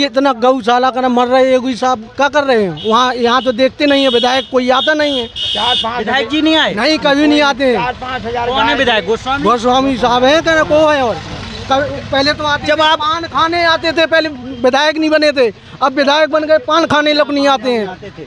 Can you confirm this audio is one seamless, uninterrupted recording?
yes; 0 cuts

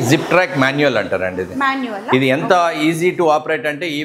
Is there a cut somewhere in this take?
no; 0 cuts

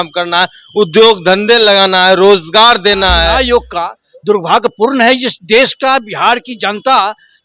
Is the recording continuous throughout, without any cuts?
no; 1 cut; at 3.3 s

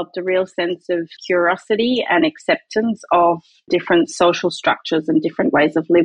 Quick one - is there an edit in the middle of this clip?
yes; 2 cuts; at 1.1 s, 3.7 s

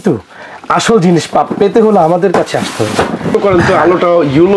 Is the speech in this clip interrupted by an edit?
yes; 1 cut; at 3.3 s

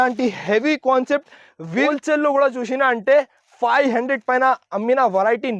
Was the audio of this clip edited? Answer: yes; 1 cut; at 1.9 s

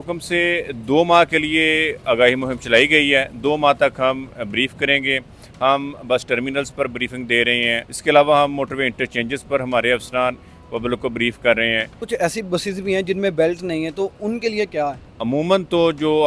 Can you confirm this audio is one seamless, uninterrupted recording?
no; 3 cuts; at 7.9 s, 12.0 s, 15.1 s

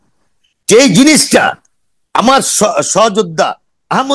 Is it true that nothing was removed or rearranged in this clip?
yes; 0 cuts

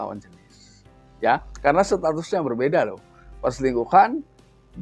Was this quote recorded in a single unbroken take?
yes; 0 cuts

